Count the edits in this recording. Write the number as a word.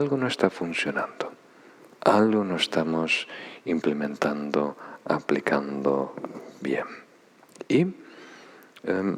zero